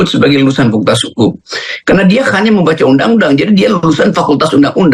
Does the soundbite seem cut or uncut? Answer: uncut